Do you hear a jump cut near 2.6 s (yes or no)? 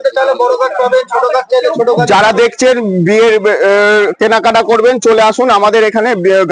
no